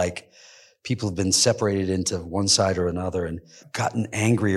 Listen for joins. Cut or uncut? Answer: cut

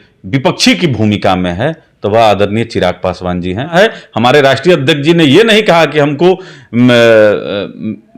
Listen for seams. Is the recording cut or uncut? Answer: cut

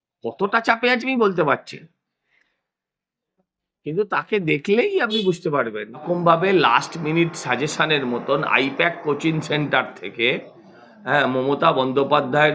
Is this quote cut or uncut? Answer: cut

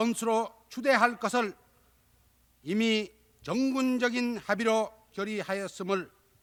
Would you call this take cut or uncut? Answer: uncut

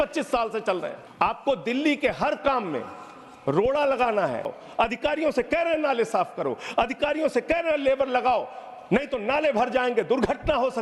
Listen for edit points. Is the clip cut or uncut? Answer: cut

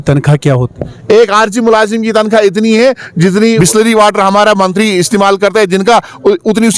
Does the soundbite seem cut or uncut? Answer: cut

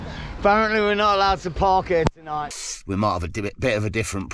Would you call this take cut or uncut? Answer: cut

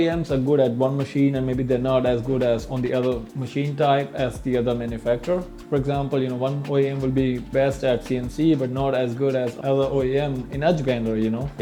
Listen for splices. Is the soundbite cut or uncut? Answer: uncut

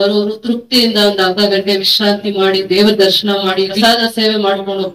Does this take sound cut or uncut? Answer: cut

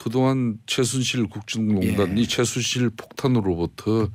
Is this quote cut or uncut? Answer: uncut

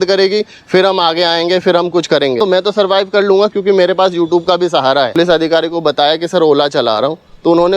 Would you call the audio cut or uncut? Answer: cut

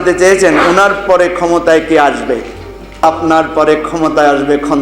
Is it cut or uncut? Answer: cut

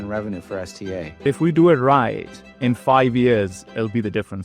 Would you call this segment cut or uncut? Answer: cut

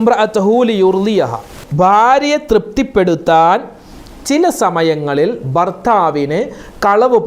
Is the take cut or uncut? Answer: cut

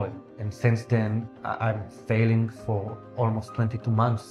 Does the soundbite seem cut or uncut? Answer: uncut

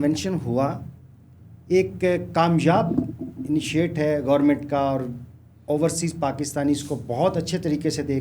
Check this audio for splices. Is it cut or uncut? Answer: uncut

